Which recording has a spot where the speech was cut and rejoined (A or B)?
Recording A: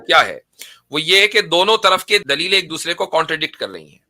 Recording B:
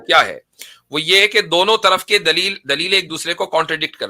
A